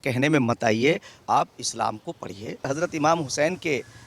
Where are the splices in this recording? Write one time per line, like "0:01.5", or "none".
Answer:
0:02.7